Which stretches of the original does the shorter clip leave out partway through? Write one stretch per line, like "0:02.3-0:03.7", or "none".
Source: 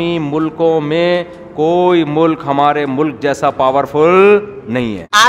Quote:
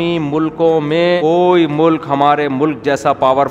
0:01.2-0:01.6

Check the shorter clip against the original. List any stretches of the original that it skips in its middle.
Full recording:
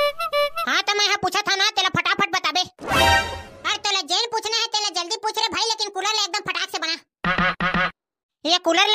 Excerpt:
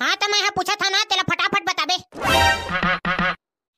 0:03.3-0:07.2

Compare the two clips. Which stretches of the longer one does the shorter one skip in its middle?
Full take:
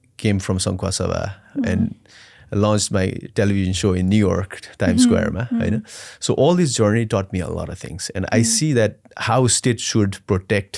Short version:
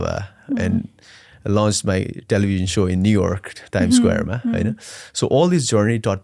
none

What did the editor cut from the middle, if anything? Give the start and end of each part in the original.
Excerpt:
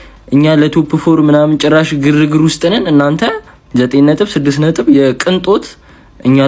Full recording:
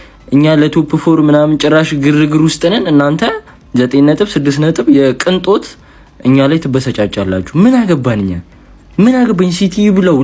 none

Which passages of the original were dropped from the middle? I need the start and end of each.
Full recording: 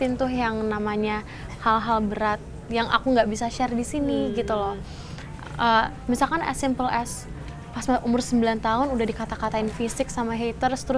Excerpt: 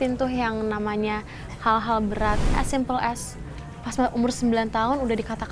0:02.6-0:06.5

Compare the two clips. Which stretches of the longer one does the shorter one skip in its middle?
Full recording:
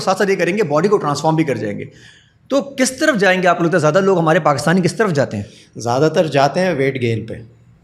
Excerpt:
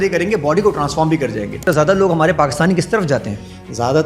0:01.9-0:03.7

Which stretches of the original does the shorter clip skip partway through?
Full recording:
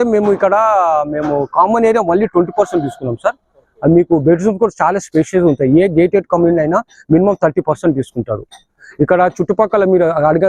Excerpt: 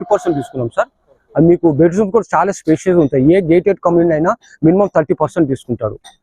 none

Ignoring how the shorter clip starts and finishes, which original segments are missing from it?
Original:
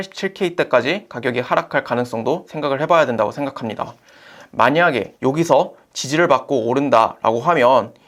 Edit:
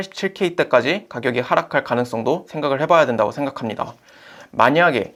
none

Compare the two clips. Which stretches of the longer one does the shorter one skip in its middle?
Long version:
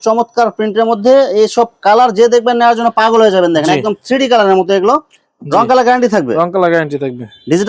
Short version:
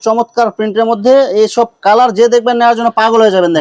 none

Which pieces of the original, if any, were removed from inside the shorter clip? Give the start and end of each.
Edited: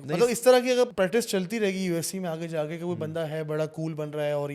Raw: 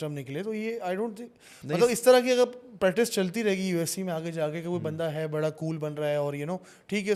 0:02.5-0:02.8

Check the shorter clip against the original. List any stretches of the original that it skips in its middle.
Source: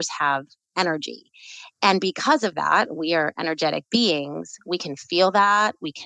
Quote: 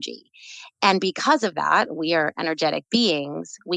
none

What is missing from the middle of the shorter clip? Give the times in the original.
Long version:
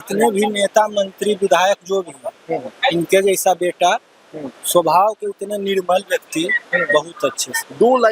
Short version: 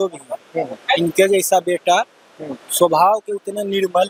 none

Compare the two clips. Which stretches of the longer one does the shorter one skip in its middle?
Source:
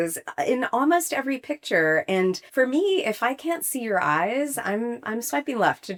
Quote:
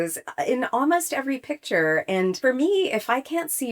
0:02.4-0:02.5

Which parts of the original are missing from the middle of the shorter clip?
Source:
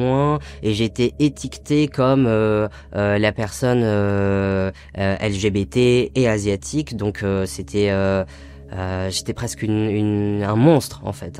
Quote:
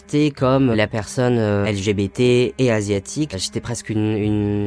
0:02.3-0:03.2
0:04.1-0:05.2
0:06.9-0:09.1

